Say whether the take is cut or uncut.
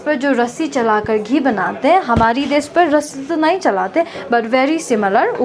uncut